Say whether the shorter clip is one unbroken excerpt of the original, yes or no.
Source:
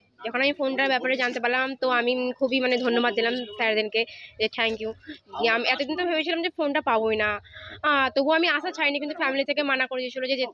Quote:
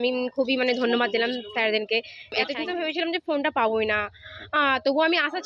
no